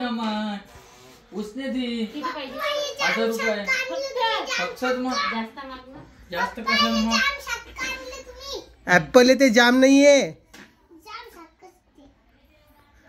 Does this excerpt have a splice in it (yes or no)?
no